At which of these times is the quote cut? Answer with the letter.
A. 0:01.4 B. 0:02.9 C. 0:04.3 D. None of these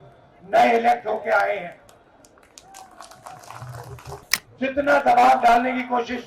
C